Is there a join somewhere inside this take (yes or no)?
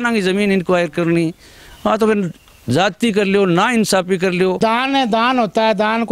yes